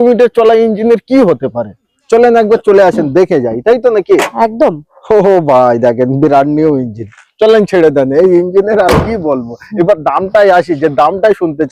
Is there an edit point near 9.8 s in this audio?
no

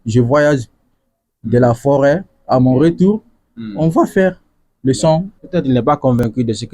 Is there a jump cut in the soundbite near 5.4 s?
yes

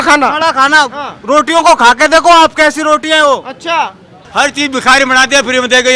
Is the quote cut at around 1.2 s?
no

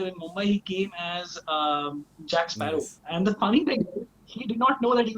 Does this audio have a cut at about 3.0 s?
yes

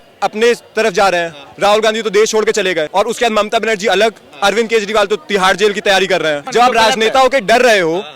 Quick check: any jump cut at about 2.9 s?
yes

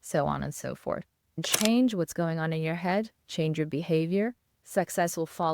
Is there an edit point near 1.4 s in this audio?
yes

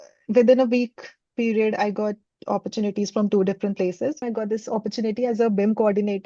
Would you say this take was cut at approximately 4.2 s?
yes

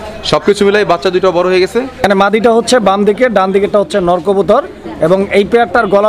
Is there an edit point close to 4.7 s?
no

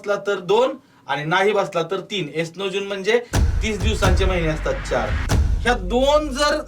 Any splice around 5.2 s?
yes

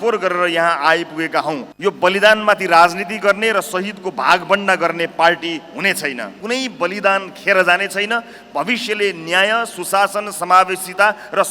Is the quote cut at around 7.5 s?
no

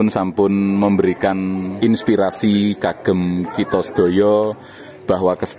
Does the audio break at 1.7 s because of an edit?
yes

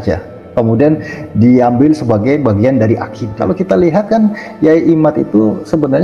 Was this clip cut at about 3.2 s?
yes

